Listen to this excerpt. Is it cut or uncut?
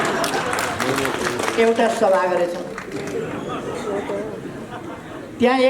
uncut